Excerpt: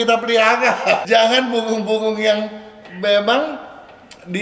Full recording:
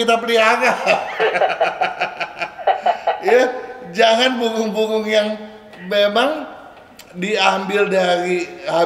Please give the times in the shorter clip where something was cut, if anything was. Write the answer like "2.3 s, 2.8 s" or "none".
1.0 s